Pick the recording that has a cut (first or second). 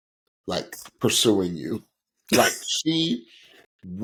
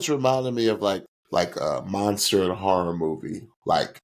second